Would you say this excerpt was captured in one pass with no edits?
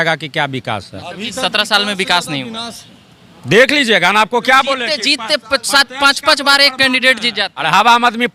yes; 0 cuts

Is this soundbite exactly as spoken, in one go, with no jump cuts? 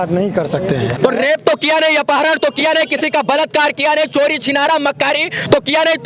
no; 1 cut; at 1.0 s

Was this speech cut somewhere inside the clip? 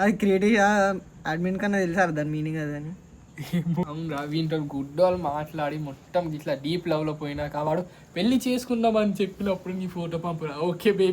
yes; 1 cut; at 3.8 s

